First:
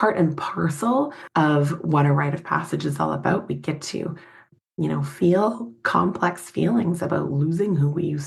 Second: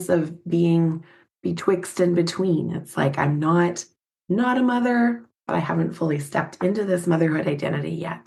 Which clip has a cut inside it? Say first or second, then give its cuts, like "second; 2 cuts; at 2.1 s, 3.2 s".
first; 2 cuts; at 1.2 s, 4.5 s